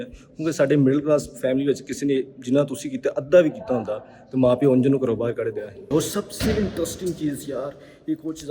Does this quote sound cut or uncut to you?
cut